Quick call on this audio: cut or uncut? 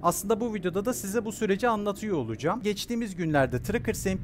cut